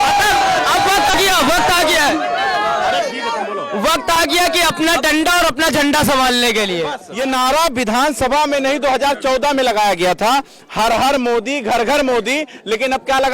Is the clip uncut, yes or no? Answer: no